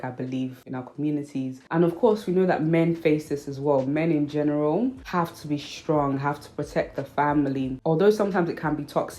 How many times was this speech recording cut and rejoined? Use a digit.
1